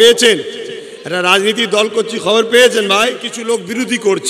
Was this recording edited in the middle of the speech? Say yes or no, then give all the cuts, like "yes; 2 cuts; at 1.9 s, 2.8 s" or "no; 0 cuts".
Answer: yes; 1 cut; at 3.3 s